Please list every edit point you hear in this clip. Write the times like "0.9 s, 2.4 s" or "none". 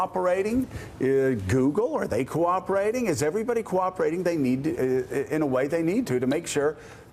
none